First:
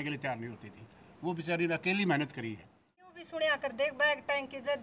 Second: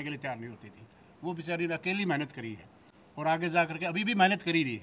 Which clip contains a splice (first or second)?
first